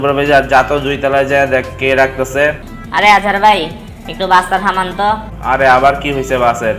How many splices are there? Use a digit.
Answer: 1